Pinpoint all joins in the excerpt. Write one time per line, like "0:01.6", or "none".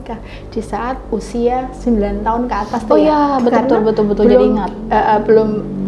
none